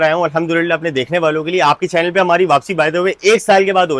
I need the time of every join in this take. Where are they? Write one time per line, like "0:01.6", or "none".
none